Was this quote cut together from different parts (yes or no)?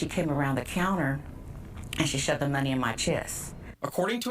yes